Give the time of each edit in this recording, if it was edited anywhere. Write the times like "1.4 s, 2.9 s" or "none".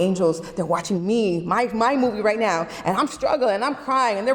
none